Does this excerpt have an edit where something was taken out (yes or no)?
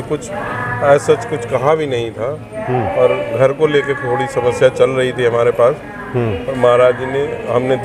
no